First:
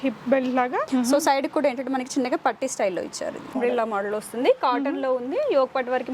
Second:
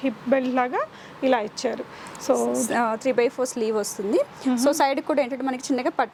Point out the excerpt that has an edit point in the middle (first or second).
first